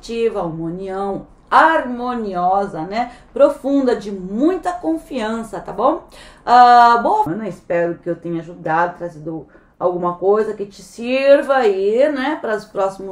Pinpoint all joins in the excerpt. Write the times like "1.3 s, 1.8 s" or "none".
7.3 s